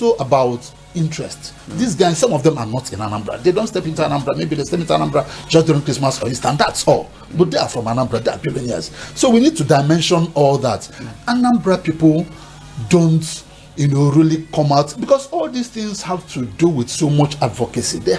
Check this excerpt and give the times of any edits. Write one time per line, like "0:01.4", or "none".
none